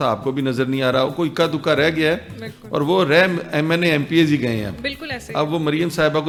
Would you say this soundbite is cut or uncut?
uncut